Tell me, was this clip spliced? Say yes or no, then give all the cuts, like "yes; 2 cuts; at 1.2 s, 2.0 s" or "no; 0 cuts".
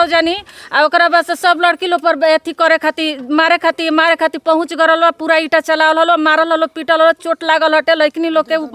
no; 0 cuts